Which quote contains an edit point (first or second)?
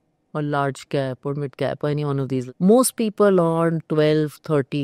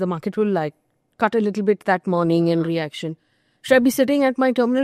first